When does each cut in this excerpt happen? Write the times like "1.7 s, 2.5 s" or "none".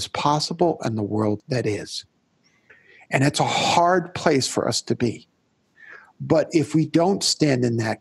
1.4 s